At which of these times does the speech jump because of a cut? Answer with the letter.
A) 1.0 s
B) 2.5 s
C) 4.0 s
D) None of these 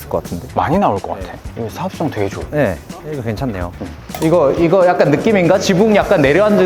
C